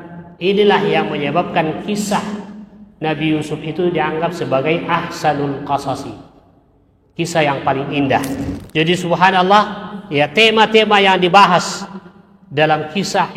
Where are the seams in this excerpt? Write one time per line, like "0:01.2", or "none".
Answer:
0:08.6